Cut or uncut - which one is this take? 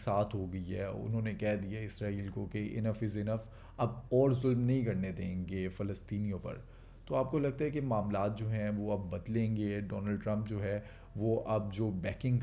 uncut